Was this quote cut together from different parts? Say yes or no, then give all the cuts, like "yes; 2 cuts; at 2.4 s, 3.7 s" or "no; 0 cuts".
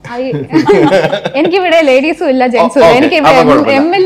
no; 0 cuts